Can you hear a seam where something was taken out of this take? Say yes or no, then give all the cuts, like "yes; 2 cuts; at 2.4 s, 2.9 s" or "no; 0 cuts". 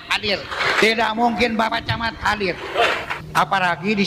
yes; 1 cut; at 3.1 s